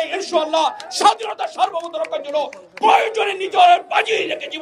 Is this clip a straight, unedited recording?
yes; 0 cuts

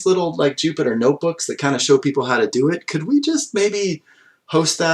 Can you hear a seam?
no; 0 cuts

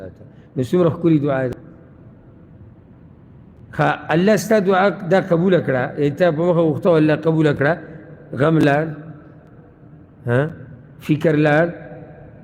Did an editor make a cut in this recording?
yes; 1 cut; at 1.5 s

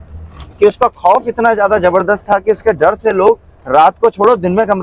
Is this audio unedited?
yes; 0 cuts

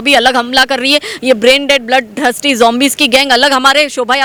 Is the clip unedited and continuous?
yes; 0 cuts

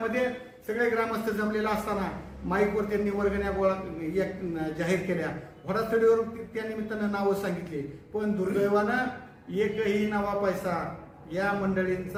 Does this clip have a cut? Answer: no; 0 cuts

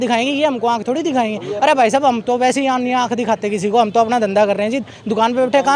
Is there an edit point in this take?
no; 0 cuts

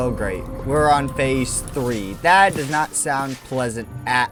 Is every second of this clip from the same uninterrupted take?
yes; 0 cuts

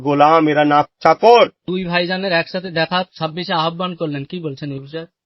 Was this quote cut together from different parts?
yes; 1 cut; at 1.6 s

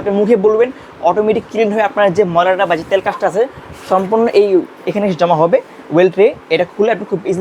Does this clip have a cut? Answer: no; 0 cuts

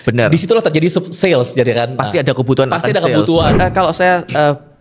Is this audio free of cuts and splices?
no; 1 cut; at 3.5 s

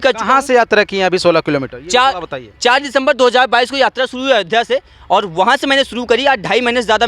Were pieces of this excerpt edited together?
no; 0 cuts

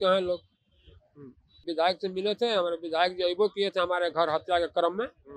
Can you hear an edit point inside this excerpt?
yes; 1 cut; at 1.7 s

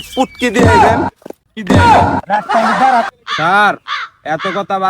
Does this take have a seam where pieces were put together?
yes; 1 cut; at 3.1 s

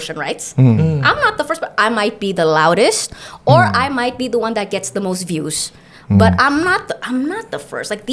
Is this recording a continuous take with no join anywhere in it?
yes; 0 cuts

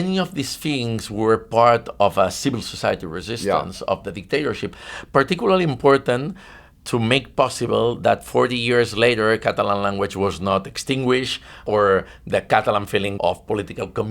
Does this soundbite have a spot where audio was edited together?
yes; 2 cuts; at 11.6 s, 13.1 s

